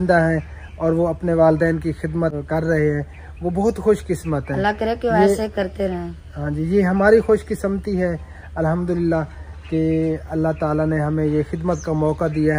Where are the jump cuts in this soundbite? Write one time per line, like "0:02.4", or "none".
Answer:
none